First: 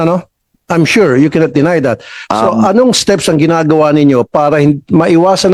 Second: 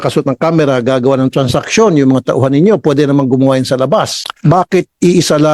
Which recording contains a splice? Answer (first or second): second